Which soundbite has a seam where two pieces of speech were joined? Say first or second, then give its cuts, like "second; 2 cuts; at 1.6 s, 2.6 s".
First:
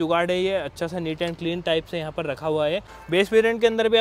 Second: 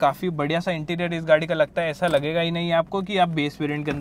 first; 1 cut; at 2.9 s